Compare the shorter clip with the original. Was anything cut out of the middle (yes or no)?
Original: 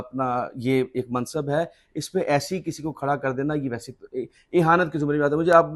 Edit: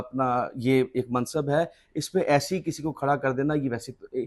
no